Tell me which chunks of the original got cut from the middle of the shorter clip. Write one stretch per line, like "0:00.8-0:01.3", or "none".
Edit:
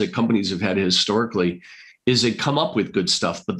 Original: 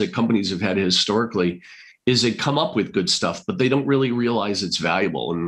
none